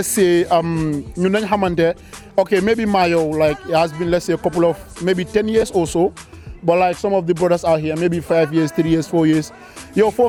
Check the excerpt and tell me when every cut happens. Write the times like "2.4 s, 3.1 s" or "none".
none